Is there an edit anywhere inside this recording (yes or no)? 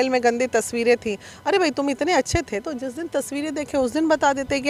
no